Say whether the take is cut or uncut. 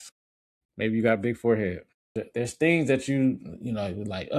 cut